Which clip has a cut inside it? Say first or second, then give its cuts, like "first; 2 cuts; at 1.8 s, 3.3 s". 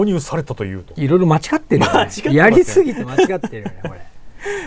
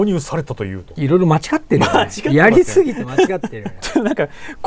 second; 1 cut; at 3.7 s